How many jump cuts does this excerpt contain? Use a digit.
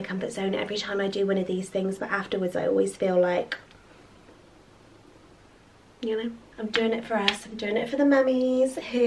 0